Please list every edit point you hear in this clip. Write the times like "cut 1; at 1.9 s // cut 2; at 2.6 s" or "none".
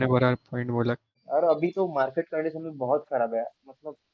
cut 1; at 1.2 s